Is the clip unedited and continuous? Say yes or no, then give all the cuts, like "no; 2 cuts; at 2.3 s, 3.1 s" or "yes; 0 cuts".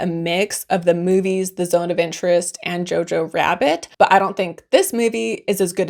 yes; 0 cuts